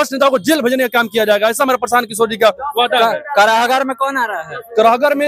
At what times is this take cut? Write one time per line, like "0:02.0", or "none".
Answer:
none